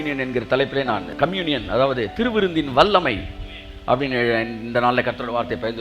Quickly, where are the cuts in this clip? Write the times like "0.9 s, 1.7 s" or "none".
1.1 s